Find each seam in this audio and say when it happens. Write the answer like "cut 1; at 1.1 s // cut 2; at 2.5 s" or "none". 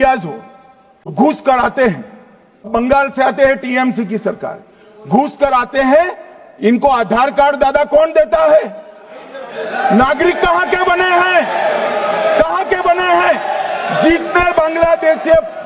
cut 1; at 1.1 s // cut 2; at 2.7 s